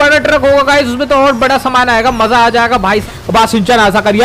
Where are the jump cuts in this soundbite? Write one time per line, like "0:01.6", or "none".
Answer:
0:03.0